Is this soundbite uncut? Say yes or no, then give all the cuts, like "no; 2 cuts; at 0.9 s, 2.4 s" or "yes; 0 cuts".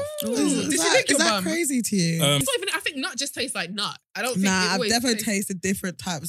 no; 1 cut; at 2.4 s